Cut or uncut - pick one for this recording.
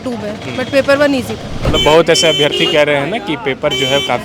cut